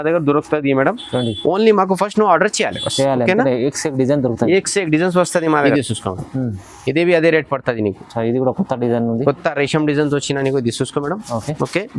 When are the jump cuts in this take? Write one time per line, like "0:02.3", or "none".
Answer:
0:05.7